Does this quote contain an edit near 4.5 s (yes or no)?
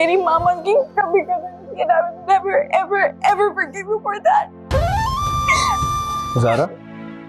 no